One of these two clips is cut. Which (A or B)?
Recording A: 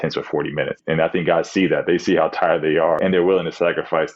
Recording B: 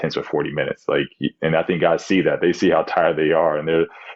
A